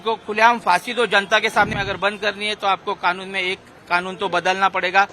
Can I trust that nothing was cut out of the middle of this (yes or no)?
no